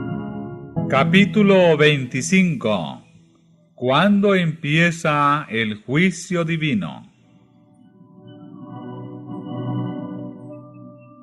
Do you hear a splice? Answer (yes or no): no